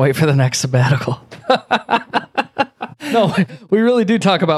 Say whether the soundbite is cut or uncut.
uncut